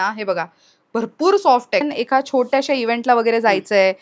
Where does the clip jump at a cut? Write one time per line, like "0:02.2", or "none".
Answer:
0:01.8